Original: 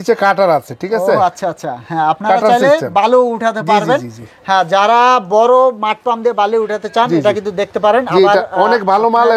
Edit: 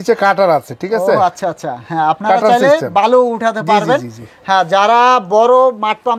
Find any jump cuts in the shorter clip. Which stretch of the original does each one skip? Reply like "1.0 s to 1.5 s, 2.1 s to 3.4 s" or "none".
none